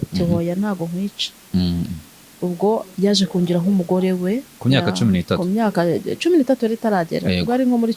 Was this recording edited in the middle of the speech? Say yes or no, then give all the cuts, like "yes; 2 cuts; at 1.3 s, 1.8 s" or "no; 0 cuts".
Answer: yes; 1 cut; at 4.5 s